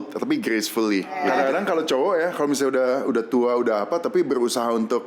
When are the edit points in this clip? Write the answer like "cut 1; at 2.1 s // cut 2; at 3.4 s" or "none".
cut 1; at 1.2 s